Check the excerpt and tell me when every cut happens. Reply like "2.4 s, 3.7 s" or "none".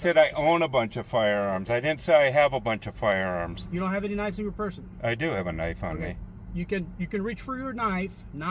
3.6 s